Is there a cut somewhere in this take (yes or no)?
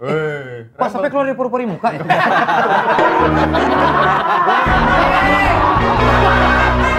no